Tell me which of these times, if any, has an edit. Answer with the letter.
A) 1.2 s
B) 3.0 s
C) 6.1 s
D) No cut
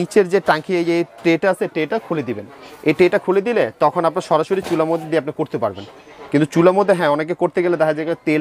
D